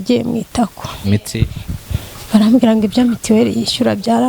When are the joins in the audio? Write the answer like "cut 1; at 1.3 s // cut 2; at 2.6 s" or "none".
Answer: cut 1; at 0.9 s

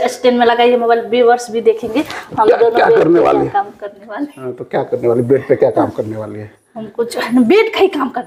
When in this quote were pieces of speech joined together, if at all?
none

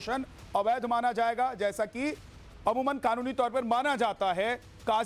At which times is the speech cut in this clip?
none

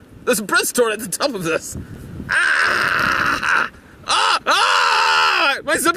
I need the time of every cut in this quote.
cut 1; at 3.8 s

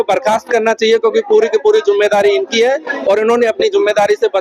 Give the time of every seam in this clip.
none

